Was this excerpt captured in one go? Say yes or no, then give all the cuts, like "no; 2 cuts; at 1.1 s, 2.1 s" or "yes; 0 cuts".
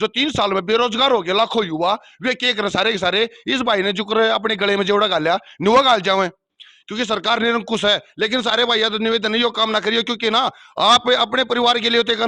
yes; 0 cuts